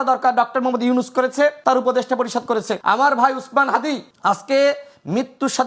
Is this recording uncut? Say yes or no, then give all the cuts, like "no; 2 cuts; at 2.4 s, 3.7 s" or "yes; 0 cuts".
no; 3 cuts; at 1.6 s, 2.7 s, 4.1 s